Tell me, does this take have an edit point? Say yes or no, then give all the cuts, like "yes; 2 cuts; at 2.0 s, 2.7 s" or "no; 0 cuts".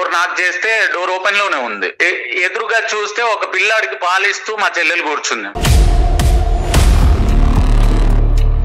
no; 0 cuts